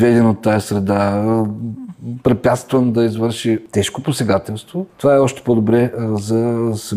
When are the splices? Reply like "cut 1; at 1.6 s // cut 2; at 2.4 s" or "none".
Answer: cut 1; at 3.7 s // cut 2; at 4.9 s